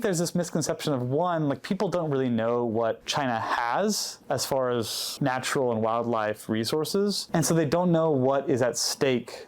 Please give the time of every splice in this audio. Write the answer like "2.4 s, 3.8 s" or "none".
3.0 s, 4.1 s, 5.0 s, 7.2 s

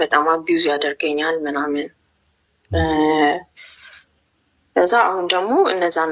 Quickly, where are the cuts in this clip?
none

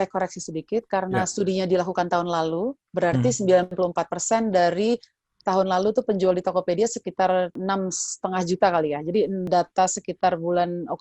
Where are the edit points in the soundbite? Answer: 3.7 s, 7.6 s, 9.5 s

